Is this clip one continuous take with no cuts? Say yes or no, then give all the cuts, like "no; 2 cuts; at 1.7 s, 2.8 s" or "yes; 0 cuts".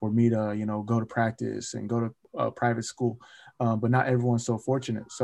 yes; 0 cuts